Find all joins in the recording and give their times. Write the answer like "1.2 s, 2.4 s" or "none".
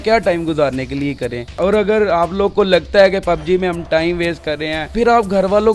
none